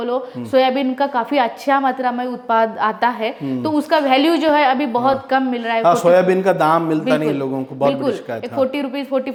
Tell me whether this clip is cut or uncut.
uncut